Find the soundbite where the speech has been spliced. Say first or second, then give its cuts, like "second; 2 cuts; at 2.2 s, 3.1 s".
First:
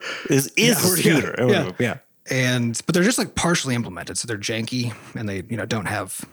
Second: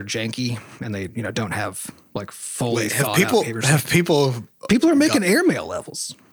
first; 1 cut; at 2.0 s